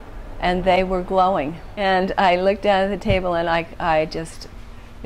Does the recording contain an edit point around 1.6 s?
yes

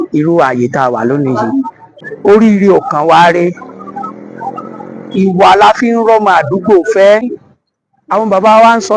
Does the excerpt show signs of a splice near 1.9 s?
yes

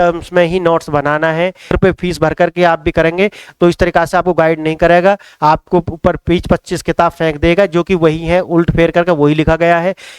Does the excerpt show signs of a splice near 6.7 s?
no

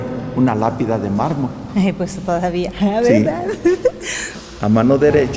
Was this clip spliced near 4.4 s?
no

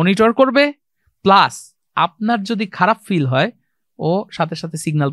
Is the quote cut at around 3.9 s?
no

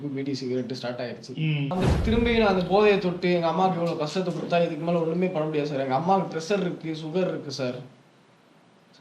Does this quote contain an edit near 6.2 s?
no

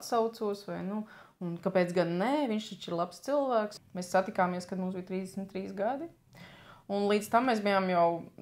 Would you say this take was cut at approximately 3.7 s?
yes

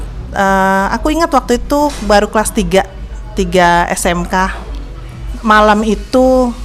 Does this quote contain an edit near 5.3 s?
yes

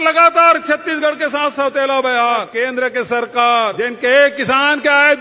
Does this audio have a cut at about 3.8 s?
yes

